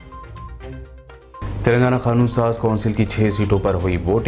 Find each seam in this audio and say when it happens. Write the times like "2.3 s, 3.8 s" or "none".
1.3 s